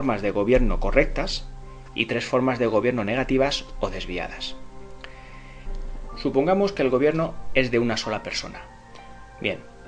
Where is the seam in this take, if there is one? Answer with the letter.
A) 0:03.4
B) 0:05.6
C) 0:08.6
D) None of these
A